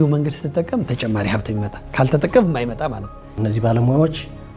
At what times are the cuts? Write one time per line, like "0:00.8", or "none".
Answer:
0:03.3

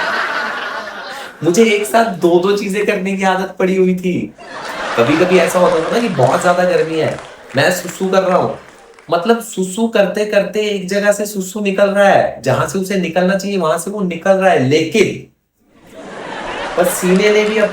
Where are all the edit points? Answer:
0:01.3

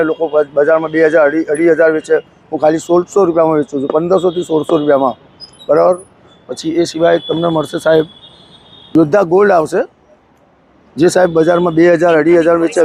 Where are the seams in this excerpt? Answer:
none

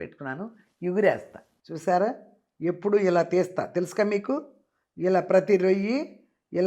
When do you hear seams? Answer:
0:01.7

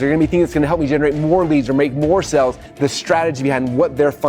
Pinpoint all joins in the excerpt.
0:02.7

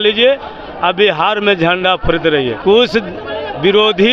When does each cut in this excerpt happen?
0:02.6

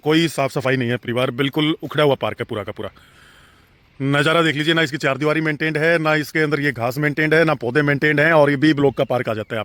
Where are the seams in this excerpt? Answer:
none

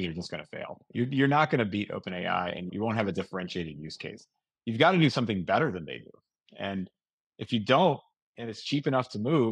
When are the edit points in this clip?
0:02.7

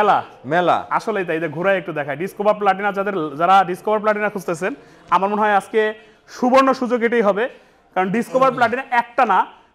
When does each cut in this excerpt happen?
none

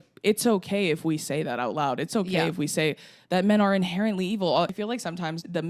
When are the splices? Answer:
0:04.8

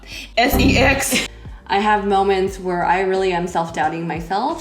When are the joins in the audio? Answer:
0:01.2

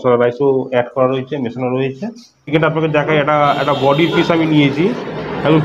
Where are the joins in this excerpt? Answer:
0:02.5

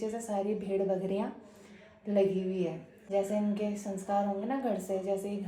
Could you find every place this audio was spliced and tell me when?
0:02.9

